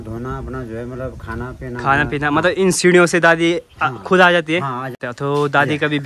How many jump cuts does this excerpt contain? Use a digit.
1